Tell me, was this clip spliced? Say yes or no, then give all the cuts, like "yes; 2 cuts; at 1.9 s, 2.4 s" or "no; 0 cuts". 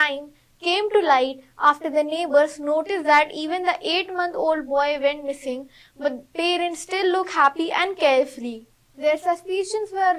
yes; 1 cut; at 9.1 s